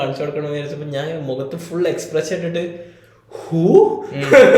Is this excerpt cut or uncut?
uncut